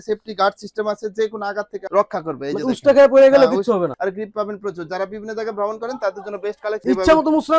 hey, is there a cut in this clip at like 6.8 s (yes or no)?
yes